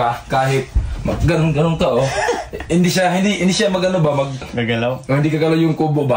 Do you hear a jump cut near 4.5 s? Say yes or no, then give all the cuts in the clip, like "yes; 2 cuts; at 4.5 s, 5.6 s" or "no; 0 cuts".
yes; 1 cut; at 4.5 s